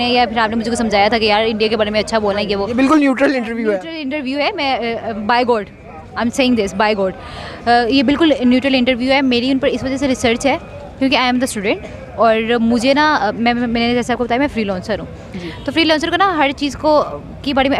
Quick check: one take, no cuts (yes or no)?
yes